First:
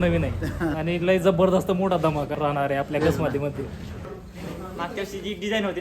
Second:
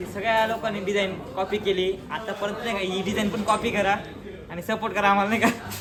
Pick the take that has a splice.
first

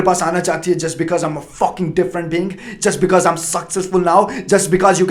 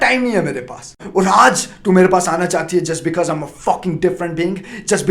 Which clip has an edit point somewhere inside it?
second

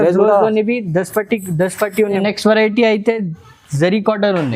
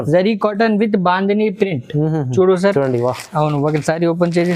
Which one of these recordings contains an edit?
first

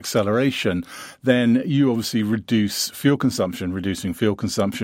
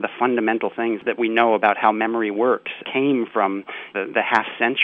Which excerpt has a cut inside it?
second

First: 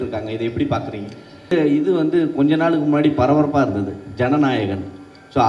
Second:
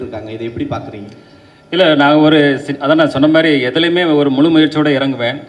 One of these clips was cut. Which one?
first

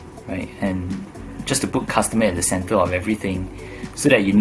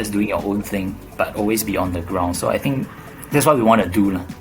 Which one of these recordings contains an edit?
second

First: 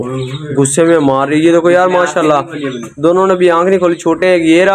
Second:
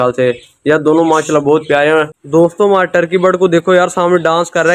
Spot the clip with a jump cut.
second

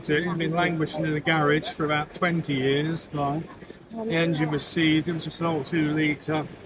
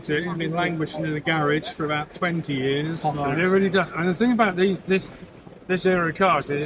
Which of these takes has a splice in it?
second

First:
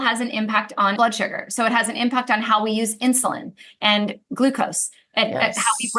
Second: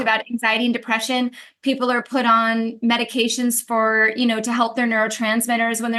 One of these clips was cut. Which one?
first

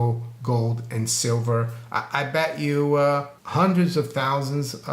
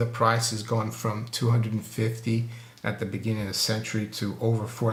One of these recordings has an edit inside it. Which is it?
first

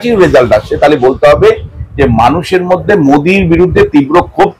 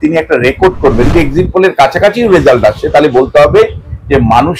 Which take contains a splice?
second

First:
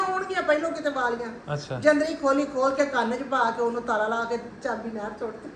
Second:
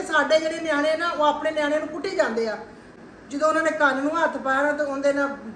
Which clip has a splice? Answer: second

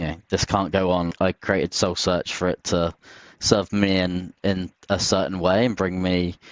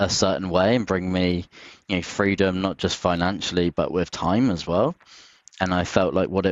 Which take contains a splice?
first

